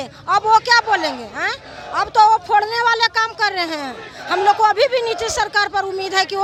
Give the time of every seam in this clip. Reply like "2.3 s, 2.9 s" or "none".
none